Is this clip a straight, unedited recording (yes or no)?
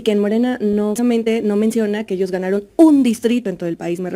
no